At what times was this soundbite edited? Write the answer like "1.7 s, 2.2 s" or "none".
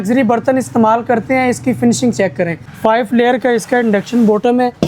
2.7 s